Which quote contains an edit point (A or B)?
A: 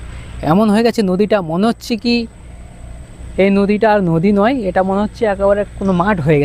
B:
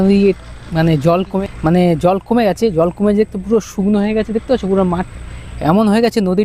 B